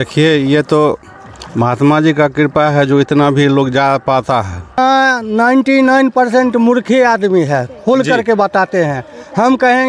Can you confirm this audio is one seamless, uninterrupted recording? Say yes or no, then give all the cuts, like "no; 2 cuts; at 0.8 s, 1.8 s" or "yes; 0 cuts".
no; 1 cut; at 4.6 s